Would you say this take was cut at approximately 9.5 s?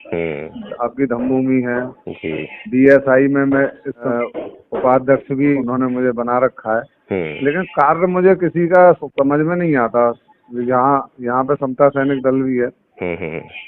no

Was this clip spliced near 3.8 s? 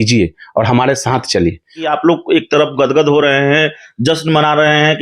no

